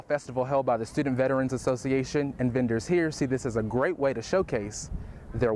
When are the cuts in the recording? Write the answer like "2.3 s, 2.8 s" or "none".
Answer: none